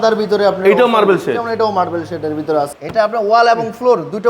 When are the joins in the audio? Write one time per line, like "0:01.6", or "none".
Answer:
0:02.7